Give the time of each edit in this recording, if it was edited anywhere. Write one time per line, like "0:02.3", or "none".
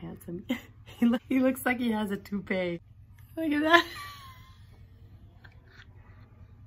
0:01.2
0:03.0